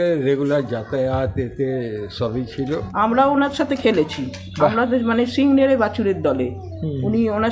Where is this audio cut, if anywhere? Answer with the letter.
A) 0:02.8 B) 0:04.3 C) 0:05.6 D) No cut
A